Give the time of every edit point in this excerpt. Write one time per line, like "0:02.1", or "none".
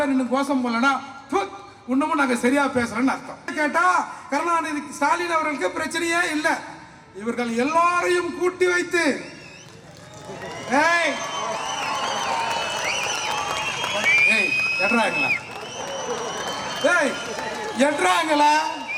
0:03.5